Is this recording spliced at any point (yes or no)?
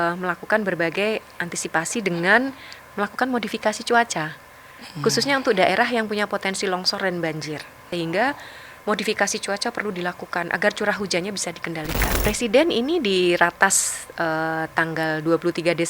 yes